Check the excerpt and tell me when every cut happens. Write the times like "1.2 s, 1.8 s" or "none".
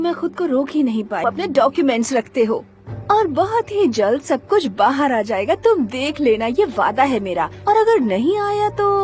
1.2 s